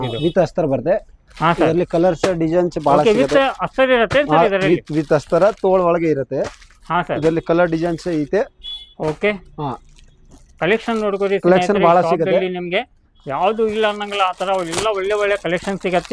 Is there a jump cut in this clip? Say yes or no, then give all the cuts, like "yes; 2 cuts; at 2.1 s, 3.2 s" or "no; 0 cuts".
no; 0 cuts